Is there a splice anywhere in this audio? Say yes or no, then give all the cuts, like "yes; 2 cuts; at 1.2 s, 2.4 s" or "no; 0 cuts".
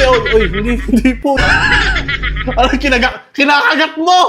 yes; 1 cut; at 1.4 s